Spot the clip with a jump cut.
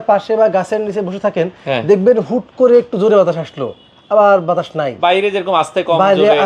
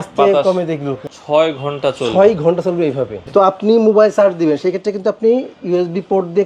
second; 2 cuts; at 1.0 s, 3.2 s

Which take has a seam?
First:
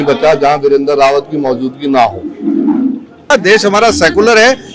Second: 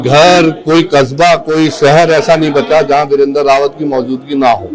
first; 1 cut; at 3.2 s

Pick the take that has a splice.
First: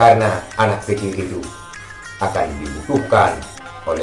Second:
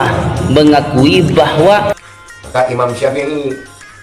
second; 1 cut; at 1.9 s

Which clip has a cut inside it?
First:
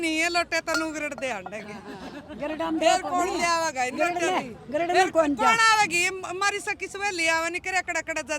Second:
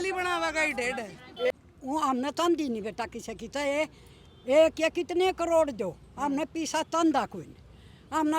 second; 1 cut; at 1.5 s

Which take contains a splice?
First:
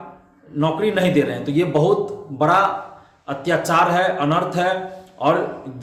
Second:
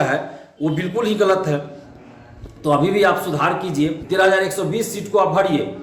second; 1 cut; at 4.0 s

